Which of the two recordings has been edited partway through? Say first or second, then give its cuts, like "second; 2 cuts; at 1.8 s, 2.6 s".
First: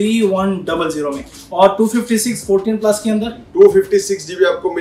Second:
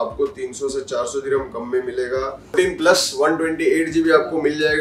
second; 1 cut; at 2.4 s